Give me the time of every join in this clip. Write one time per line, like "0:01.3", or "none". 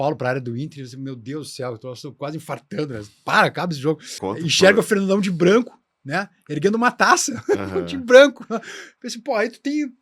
0:04.1